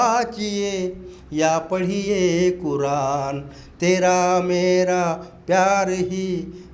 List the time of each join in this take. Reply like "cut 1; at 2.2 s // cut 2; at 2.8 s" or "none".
none